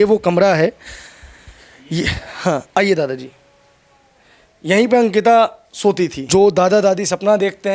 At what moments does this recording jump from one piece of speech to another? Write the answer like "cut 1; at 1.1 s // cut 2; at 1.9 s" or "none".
cut 1; at 6.2 s